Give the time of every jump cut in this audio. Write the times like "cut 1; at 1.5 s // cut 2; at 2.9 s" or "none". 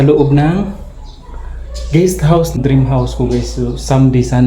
cut 1; at 2.6 s